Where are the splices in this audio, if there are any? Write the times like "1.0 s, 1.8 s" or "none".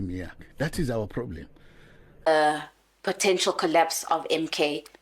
2.1 s

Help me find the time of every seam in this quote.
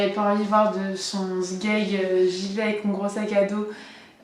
2.1 s

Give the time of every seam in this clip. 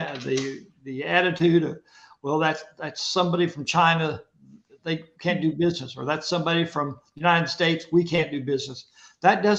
none

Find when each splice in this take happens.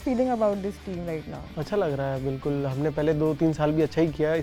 none

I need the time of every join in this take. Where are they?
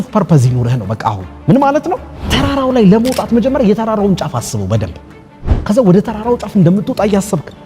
2.2 s

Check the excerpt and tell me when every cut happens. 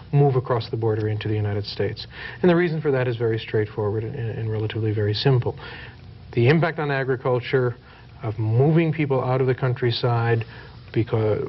none

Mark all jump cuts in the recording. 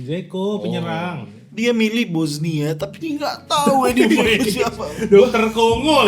none

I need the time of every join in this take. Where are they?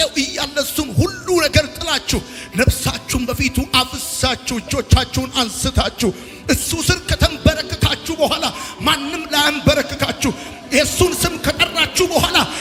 none

